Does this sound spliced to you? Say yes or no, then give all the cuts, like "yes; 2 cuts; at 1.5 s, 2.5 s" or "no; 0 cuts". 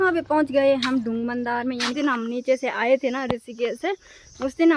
yes; 1 cut; at 1.9 s